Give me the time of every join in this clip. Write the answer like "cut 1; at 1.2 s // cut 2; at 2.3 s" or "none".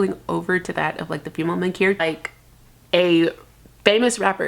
cut 1; at 2.0 s